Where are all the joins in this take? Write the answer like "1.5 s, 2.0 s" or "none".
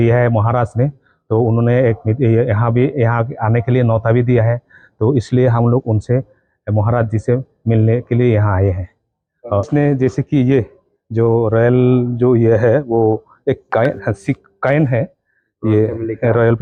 none